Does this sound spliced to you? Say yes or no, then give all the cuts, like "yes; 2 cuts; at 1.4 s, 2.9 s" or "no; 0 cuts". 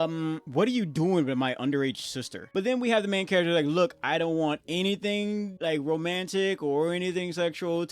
yes; 1 cut; at 2.4 s